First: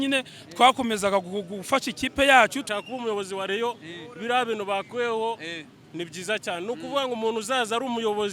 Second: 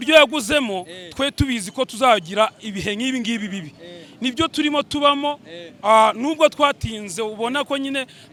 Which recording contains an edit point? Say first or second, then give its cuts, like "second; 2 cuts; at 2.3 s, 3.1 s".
first; 1 cut; at 2.6 s